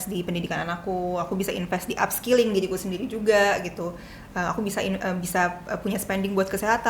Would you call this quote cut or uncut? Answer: uncut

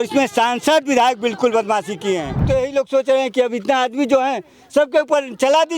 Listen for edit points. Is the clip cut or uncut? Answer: cut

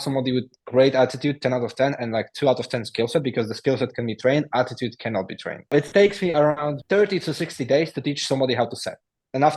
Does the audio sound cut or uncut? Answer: cut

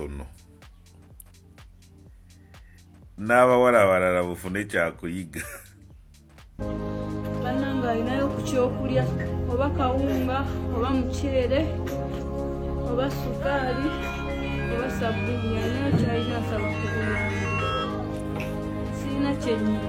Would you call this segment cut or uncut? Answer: uncut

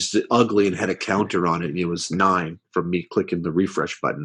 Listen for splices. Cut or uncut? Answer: uncut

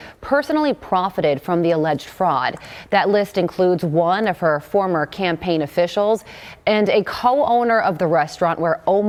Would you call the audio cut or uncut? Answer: uncut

